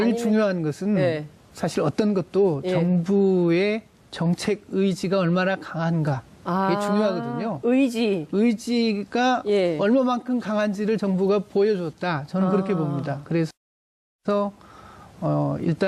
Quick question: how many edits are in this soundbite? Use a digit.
1